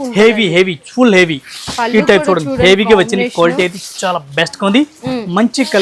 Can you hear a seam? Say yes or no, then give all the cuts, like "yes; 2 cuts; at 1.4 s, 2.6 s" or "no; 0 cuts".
no; 0 cuts